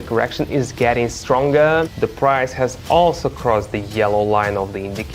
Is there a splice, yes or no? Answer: yes